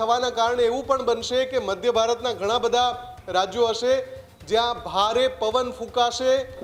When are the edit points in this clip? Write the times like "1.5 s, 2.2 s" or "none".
none